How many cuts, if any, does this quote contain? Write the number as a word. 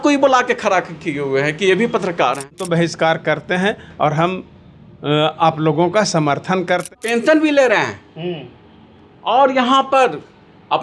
two